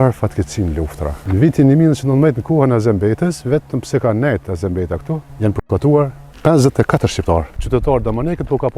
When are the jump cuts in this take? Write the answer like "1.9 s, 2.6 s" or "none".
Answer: 1.1 s, 5.3 s, 6.2 s, 7.6 s